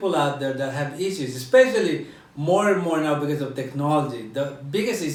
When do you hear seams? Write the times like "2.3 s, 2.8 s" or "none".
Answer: none